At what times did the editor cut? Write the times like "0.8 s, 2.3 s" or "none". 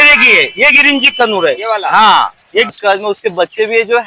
2.7 s